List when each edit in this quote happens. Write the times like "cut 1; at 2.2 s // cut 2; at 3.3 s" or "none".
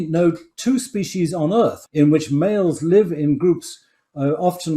cut 1; at 1.8 s